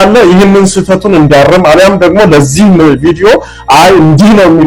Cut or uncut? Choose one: uncut